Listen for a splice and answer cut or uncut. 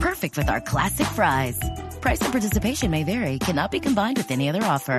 uncut